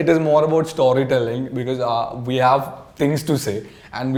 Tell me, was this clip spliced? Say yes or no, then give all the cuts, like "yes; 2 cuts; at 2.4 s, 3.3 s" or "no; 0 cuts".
no; 0 cuts